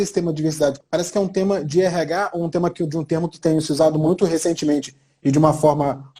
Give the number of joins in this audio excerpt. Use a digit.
2